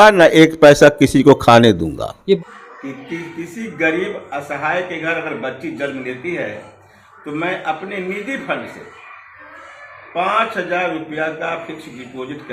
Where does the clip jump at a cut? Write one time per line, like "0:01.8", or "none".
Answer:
0:02.4